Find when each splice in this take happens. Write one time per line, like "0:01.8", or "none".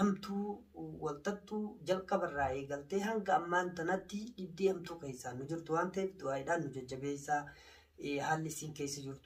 none

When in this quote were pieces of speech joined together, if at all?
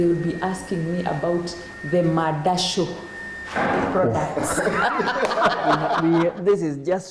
0:06.0

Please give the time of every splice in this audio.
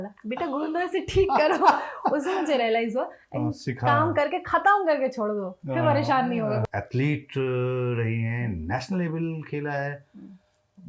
0:06.7

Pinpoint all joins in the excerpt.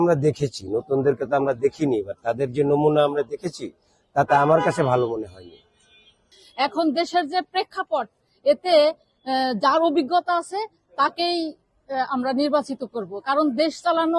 0:06.4

